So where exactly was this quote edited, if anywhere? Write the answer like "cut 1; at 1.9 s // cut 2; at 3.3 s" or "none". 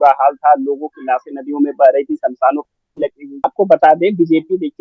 cut 1; at 3.4 s

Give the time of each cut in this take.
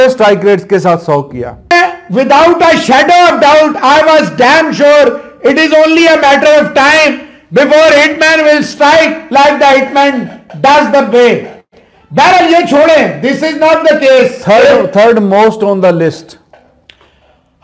cut 1; at 1.7 s

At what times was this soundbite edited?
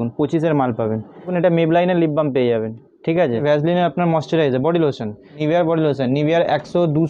cut 1; at 1.3 s // cut 2; at 3.4 s // cut 3; at 5.3 s

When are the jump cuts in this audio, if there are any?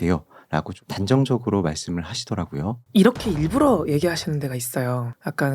cut 1; at 2.8 s

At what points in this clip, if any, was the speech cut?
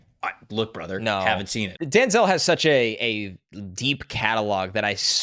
cut 1; at 1.8 s

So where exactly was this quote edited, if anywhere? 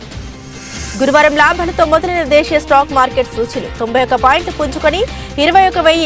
cut 1; at 0.9 s

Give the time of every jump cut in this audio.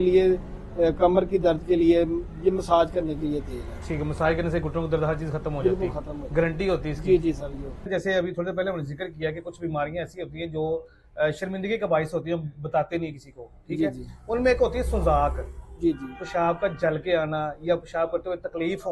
cut 1; at 7.9 s

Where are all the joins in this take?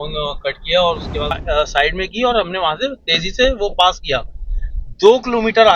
cut 1; at 1.3 s

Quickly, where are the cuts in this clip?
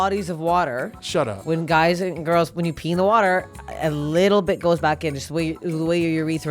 cut 1; at 0.9 s

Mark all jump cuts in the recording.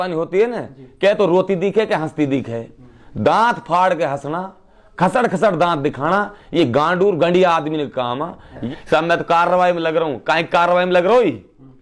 cut 1; at 8.6 s

